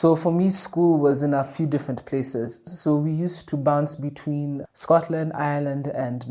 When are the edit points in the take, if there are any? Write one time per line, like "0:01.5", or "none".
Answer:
none